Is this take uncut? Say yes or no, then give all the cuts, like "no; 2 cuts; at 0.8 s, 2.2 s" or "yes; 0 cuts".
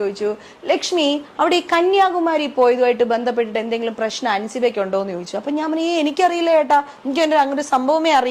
yes; 0 cuts